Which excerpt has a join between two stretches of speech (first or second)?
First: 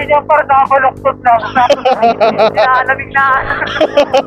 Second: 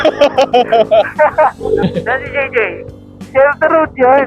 second